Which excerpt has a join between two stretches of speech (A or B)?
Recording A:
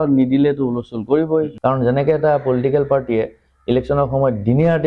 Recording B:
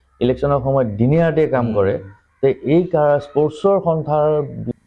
A